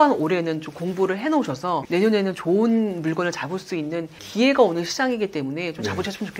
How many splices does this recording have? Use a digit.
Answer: 2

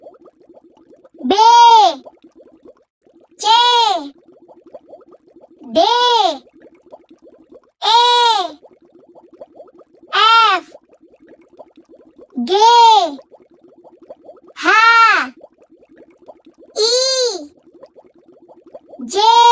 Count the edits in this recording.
4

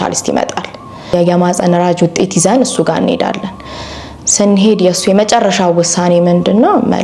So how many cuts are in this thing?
1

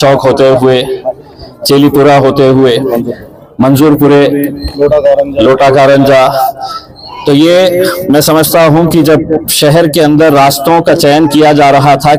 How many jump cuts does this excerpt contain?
0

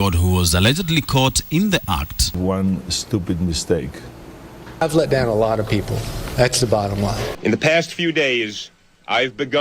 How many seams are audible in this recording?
3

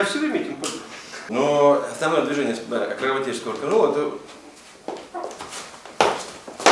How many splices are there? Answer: 1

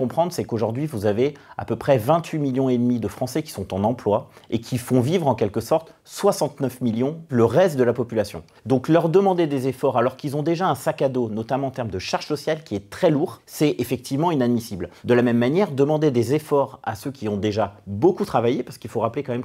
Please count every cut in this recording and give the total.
0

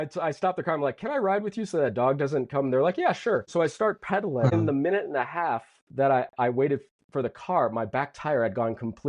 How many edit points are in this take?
2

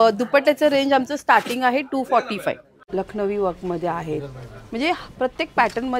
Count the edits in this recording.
1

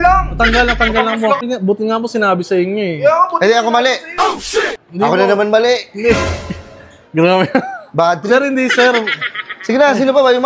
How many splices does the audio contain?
1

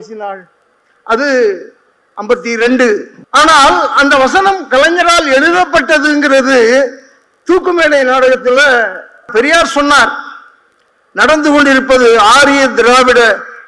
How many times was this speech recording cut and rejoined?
1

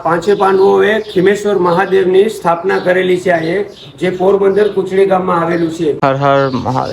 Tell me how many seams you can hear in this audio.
1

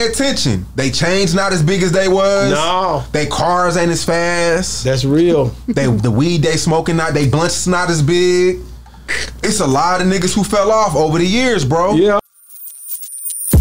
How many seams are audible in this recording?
1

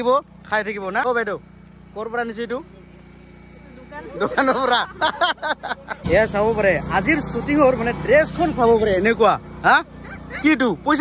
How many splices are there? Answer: 2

